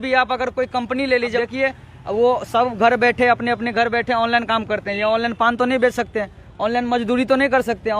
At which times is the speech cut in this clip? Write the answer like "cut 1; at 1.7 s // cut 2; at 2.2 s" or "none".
cut 1; at 1.4 s